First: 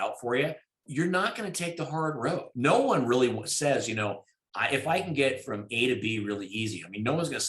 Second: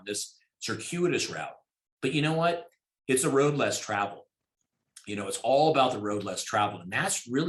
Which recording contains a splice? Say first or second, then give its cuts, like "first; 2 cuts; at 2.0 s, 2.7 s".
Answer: first; 2 cuts; at 0.8 s, 2.5 s